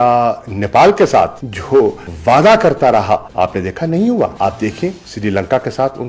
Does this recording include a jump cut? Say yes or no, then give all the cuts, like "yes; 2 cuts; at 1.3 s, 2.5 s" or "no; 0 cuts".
yes; 2 cuts; at 3.3 s, 4.3 s